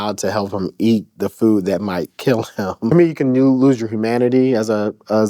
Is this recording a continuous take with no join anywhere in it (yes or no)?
no